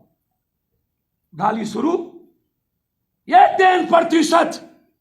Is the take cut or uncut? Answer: uncut